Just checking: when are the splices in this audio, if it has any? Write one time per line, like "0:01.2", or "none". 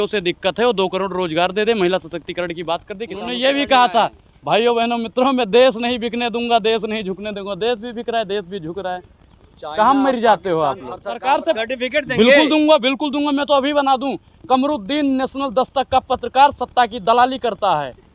0:03.3
0:11.2